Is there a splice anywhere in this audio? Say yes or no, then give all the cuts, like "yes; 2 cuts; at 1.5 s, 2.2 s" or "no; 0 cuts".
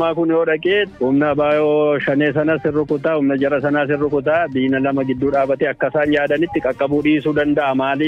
yes; 1 cut; at 0.9 s